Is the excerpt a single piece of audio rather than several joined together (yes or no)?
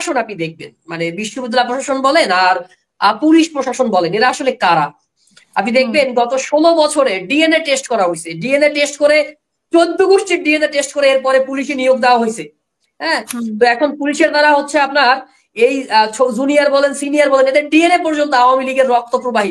yes